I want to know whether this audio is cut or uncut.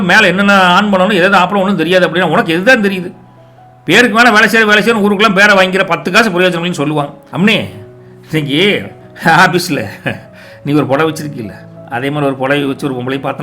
cut